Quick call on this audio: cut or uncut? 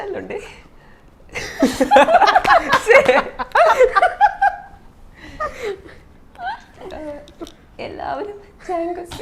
uncut